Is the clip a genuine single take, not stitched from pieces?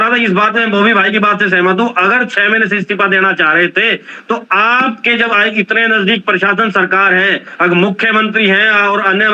yes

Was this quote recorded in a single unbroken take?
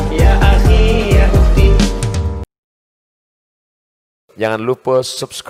yes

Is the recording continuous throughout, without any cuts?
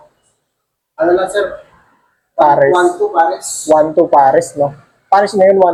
yes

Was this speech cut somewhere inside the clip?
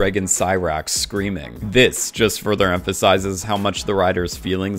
no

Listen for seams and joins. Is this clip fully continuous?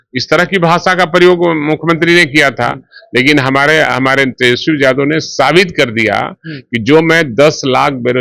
yes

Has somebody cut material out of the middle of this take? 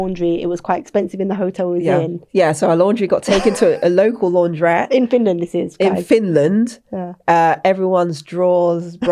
yes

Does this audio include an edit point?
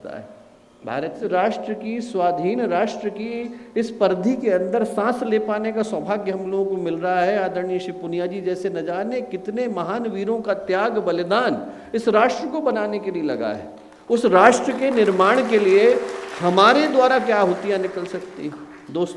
yes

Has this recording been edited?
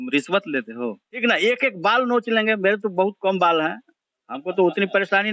yes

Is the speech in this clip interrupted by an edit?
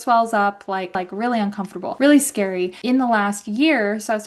yes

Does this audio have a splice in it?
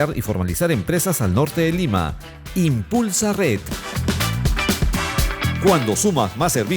yes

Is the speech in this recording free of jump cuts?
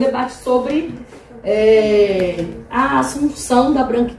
yes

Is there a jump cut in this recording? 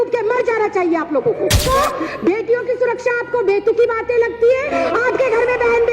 yes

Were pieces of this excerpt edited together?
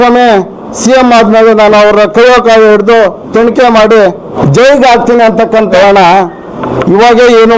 yes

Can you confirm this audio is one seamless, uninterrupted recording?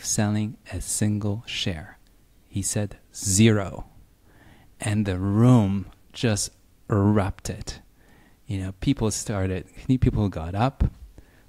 yes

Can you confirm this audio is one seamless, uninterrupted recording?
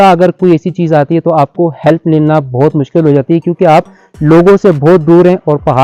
yes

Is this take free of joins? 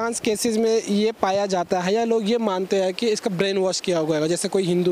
yes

